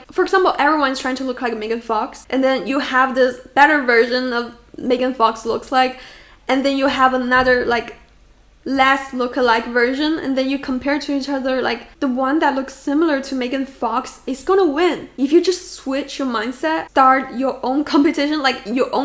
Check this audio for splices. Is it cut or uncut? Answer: cut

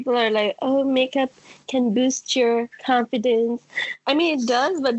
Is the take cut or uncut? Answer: uncut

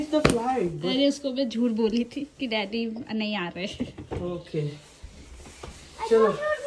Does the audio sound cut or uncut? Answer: uncut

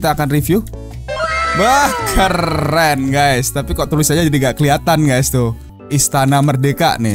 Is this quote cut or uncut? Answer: cut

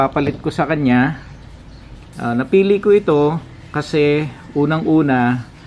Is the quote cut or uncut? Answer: uncut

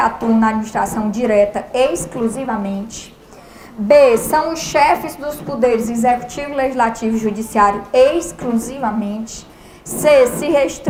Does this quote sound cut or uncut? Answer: uncut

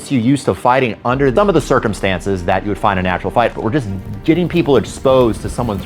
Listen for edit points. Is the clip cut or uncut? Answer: cut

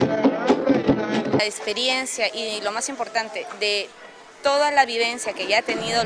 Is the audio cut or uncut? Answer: uncut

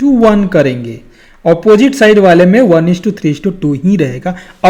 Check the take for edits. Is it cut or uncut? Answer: uncut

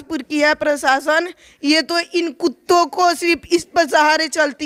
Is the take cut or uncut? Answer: uncut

